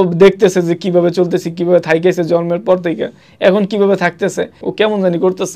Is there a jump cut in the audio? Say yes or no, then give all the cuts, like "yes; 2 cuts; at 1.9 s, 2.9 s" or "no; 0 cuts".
yes; 1 cut; at 4.6 s